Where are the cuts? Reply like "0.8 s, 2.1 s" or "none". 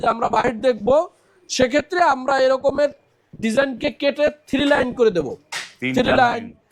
none